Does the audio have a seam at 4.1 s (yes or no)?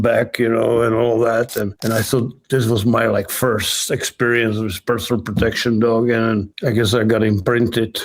no